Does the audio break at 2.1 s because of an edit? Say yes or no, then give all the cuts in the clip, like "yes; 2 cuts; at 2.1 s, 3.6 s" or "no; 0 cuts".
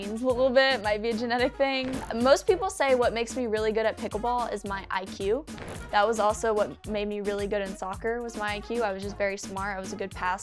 yes; 2 cuts; at 2.1 s, 6.8 s